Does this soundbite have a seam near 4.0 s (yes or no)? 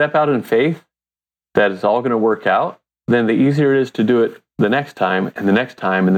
no